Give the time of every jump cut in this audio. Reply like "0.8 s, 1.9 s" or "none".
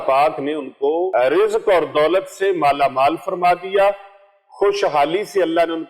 1.1 s